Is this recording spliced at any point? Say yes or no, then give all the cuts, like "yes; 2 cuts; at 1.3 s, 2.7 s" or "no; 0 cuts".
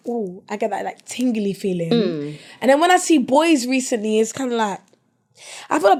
no; 0 cuts